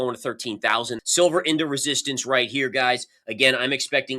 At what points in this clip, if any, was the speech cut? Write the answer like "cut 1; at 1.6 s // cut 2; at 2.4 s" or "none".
cut 1; at 1.0 s